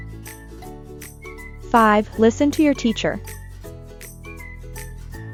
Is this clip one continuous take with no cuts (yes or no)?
yes